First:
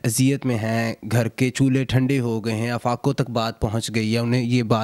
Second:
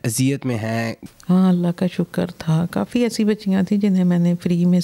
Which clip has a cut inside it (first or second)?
second